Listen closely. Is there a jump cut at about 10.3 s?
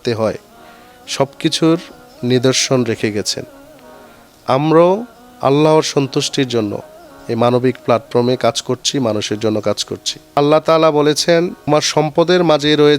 yes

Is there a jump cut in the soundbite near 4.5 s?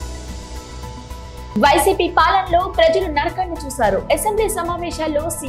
no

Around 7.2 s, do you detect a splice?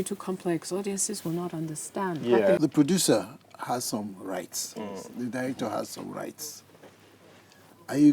no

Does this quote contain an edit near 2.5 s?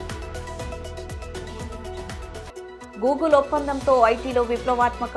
yes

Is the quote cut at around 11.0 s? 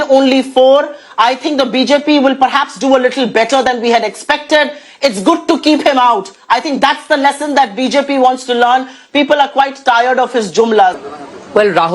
yes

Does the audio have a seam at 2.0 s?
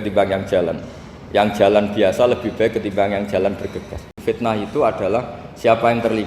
no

